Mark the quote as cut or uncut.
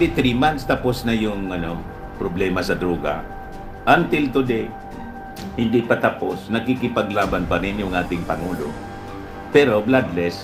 uncut